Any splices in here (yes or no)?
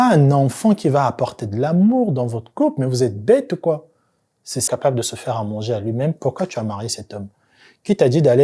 yes